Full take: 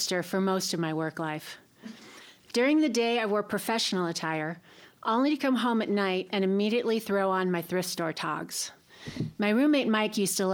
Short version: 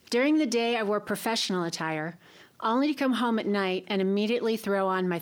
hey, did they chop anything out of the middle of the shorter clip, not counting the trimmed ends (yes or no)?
no